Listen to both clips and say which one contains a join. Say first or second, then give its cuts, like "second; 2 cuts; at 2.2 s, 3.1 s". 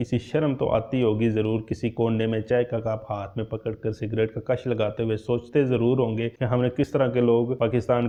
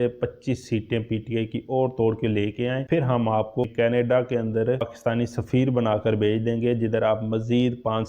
second; 2 cuts; at 3.6 s, 4.9 s